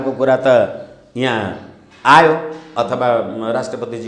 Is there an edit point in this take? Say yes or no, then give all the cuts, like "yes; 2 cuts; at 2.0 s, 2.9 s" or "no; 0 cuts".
no; 0 cuts